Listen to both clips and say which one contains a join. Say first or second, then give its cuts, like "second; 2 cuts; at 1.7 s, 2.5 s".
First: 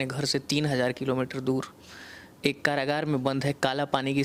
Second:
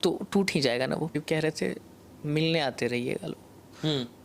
second; 1 cut; at 1.2 s